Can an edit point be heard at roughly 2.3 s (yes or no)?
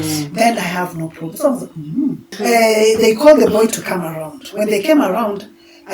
yes